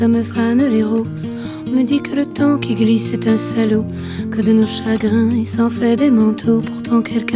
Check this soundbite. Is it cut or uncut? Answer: uncut